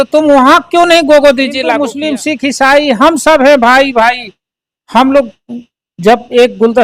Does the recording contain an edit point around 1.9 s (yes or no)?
yes